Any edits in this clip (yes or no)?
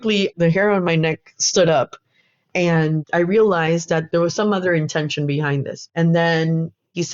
yes